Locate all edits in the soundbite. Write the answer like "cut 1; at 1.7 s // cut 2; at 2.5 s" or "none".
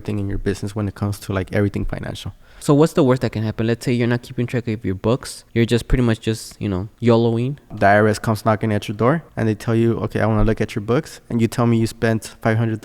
cut 1; at 2.6 s // cut 2; at 5.4 s // cut 3; at 6.9 s // cut 4; at 7.7 s // cut 5; at 9.3 s